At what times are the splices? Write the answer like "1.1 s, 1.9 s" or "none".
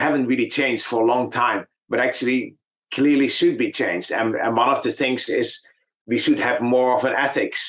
none